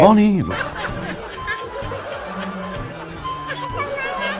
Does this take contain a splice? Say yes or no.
no